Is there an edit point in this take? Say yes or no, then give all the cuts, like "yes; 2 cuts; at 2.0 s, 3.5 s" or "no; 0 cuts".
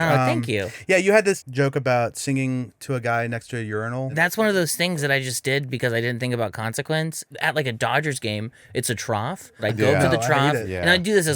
yes; 4 cuts; at 1.4 s, 4.1 s, 7.3 s, 9.6 s